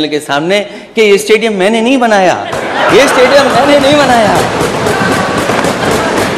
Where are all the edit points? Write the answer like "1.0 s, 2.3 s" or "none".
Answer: none